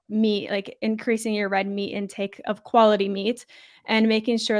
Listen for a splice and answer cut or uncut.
uncut